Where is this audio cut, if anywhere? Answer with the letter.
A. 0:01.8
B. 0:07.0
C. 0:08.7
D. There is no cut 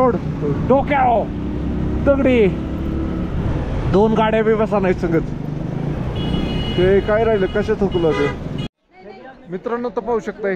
C